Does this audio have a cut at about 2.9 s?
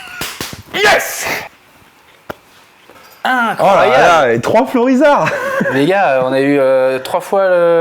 yes; 2 cuts; at 1.5 s, 2.9 s

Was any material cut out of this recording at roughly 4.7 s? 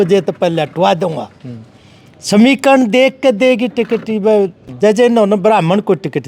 yes; 1 cut; at 4.7 s

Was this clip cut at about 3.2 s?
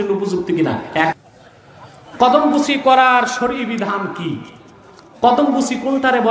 no; 1 cut; at 1.1 s

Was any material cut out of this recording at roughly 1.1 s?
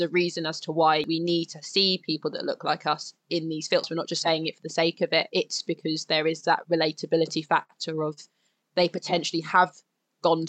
yes; 2 cuts; at 1.1 s, 3.9 s

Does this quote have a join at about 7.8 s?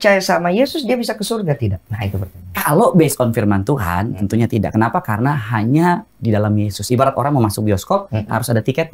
no; 0 cuts

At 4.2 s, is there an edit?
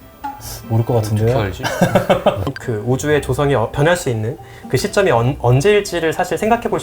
no; 1 cut; at 2.5 s

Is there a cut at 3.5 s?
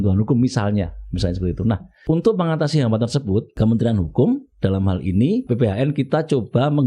yes; 3 cuts; at 1.9 s, 3.5 s, 5.5 s

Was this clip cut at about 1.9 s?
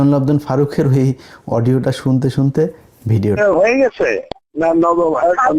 no; 1 cut; at 3.4 s

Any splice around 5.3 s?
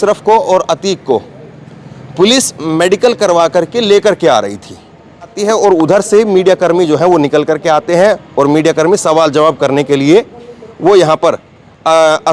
yes; 1 cut; at 5.3 s

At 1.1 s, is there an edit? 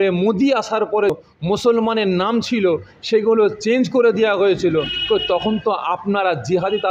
yes; 1 cut; at 1.1 s

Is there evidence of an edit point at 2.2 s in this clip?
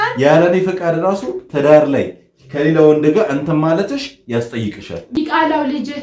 no; 1 cut; at 5.0 s

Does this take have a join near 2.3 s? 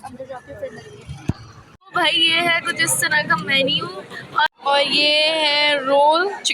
no; 1 cut; at 4.5 s

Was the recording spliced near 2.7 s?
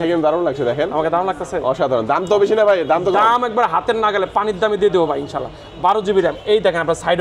no; 0 cuts

